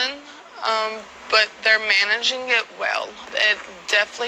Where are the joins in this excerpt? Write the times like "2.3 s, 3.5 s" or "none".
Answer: none

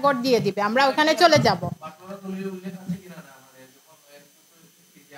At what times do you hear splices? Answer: none

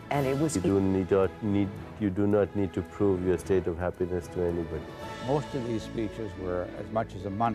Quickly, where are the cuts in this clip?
3.6 s

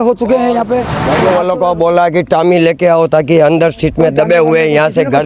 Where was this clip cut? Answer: 1.0 s

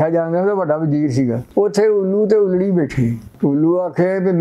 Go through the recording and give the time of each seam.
1.4 s, 3.3 s

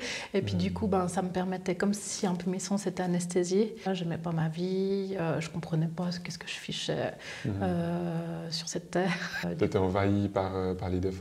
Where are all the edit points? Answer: 3.9 s, 9.4 s

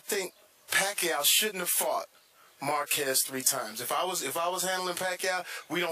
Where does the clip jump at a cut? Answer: 4.2 s

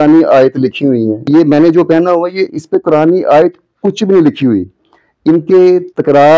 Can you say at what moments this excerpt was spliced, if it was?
1.1 s

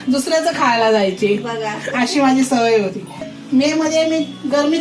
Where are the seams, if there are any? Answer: 3.3 s

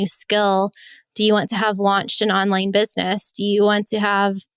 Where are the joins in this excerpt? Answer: none

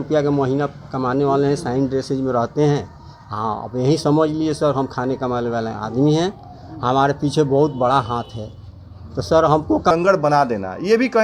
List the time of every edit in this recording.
9.9 s

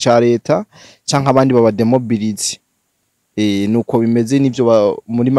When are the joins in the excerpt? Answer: none

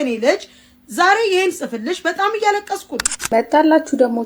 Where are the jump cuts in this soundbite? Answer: 3.3 s

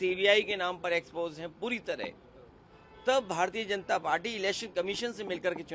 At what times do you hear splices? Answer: none

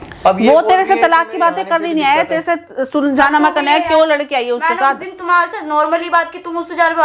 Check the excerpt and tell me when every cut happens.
none

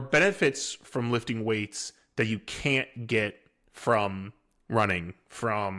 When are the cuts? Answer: none

